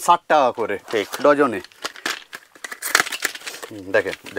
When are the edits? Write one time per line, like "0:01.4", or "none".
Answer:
none